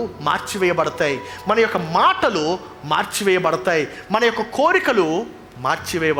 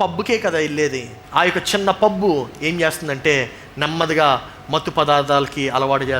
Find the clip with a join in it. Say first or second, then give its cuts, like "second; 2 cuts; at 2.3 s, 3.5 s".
second; 1 cut; at 1.2 s